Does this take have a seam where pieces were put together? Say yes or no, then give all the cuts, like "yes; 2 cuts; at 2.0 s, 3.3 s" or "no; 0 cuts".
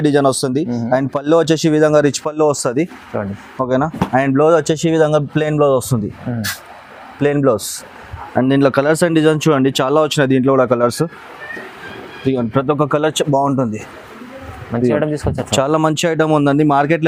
no; 0 cuts